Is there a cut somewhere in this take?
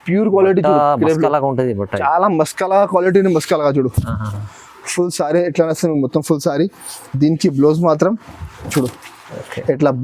no; 0 cuts

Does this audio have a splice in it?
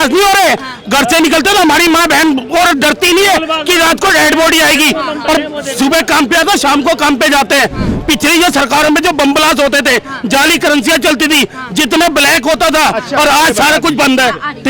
no; 0 cuts

